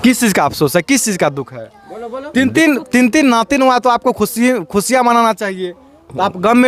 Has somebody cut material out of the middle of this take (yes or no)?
no